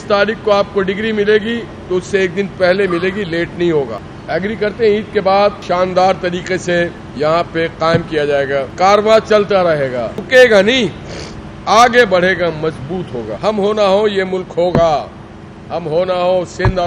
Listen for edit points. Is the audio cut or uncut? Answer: cut